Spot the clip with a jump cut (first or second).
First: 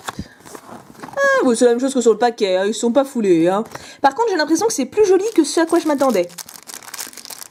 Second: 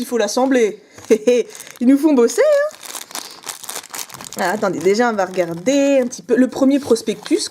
second